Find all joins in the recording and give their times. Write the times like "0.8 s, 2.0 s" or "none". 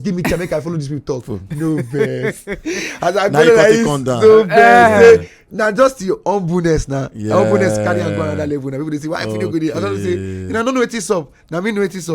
none